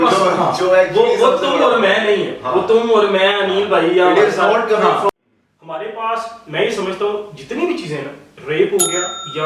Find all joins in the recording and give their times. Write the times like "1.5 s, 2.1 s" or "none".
5.1 s

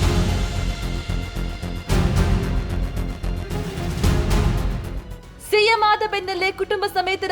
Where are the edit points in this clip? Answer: 2.4 s

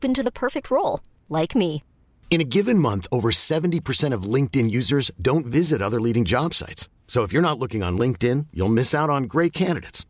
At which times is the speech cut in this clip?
none

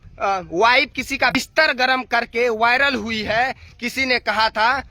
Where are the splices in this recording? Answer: 1.3 s

